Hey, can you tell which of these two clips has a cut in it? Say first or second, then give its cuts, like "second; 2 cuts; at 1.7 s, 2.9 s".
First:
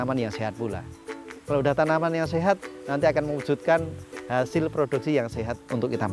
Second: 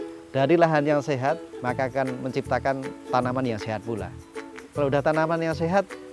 second; 1 cut; at 1.5 s